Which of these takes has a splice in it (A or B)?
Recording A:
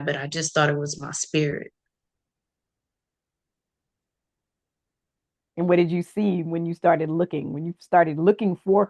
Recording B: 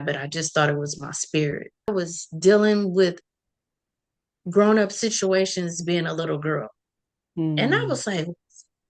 B